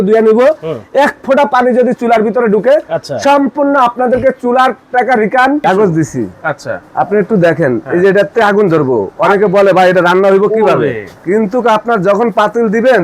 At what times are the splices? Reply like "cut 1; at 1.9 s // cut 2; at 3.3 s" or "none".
cut 1; at 5.6 s // cut 2; at 11.1 s